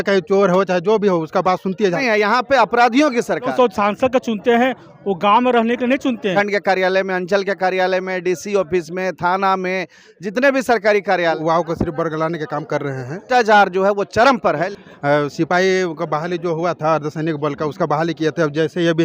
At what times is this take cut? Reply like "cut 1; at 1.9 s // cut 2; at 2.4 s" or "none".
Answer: cut 1; at 2.0 s // cut 2; at 3.5 s // cut 3; at 6.3 s // cut 4; at 11.4 s // cut 5; at 13.2 s // cut 6; at 14.7 s